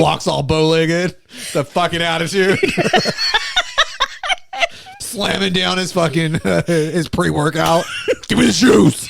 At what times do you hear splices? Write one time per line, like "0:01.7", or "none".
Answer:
0:05.1
0:08.2

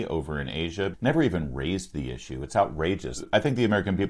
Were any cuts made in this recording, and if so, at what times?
0:00.9
0:03.2

